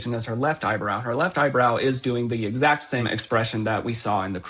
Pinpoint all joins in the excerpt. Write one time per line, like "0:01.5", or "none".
0:03.0

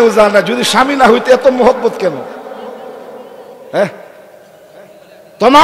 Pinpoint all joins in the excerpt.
none

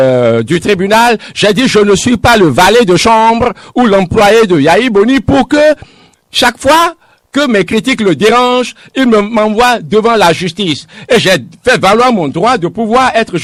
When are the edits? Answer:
none

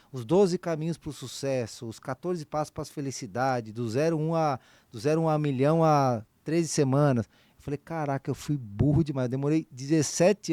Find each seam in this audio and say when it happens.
none

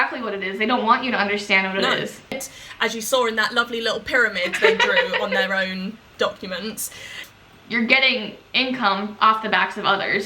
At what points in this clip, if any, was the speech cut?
0:02.5
0:07.2

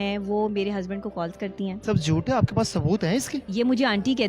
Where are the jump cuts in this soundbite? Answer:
0:01.8
0:03.4

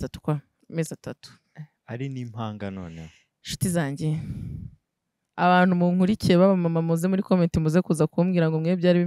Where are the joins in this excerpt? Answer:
none

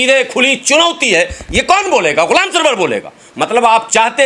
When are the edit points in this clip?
none

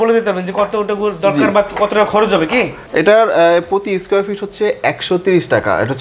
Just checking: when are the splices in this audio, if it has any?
0:02.8

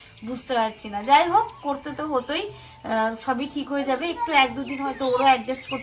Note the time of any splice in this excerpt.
none

